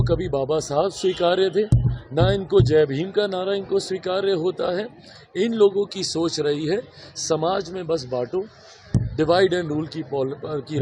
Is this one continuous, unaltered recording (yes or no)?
yes